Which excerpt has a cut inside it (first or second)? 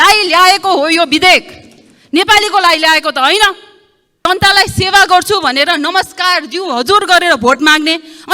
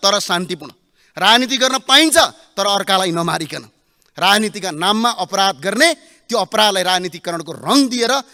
first